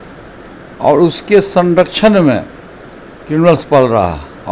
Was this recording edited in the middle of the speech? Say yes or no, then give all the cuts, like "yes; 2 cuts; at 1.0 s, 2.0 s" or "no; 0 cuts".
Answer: no; 0 cuts